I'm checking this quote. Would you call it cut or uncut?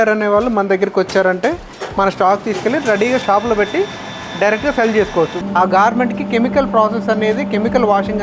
cut